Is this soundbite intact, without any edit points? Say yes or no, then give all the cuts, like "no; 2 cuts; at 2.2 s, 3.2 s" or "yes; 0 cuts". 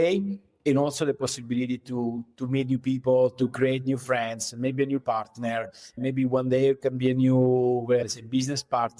yes; 0 cuts